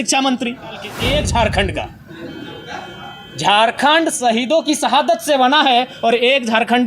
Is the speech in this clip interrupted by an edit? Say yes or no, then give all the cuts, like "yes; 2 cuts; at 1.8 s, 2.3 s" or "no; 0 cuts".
yes; 1 cut; at 0.9 s